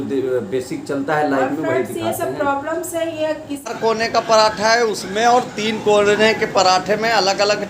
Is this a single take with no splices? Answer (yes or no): no